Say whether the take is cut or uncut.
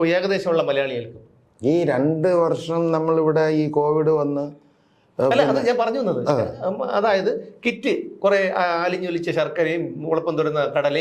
uncut